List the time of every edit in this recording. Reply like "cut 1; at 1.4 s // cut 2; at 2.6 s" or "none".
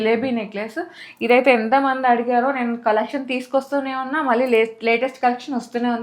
none